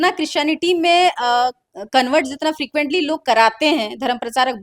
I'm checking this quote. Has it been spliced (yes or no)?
no